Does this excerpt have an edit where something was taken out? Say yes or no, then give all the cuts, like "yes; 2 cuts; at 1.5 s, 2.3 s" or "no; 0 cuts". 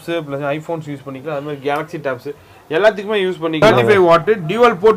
yes; 1 cut; at 3.6 s